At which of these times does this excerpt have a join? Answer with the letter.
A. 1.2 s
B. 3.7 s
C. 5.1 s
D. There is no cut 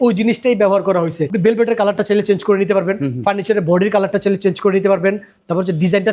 A